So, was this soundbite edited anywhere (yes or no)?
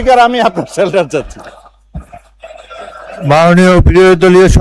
no